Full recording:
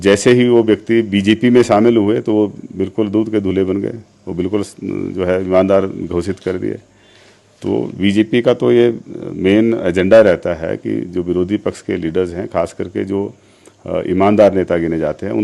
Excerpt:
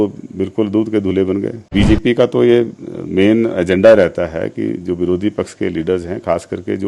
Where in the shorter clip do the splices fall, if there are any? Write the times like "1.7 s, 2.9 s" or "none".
1.6 s